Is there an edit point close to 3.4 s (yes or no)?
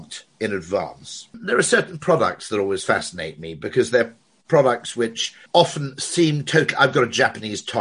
no